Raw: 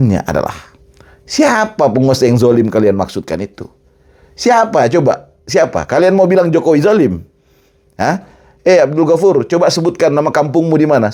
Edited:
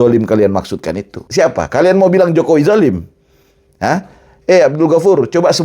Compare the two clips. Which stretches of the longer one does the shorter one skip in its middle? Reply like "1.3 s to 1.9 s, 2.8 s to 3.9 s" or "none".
3.6 s to 5.3 s